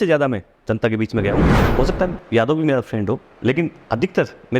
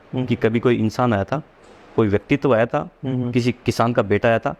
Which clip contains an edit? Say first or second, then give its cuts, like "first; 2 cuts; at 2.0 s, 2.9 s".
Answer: first; 1 cut; at 1.6 s